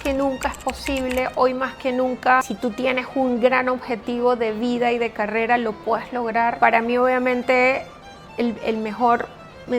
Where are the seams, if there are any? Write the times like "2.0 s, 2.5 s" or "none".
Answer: 2.5 s, 6.6 s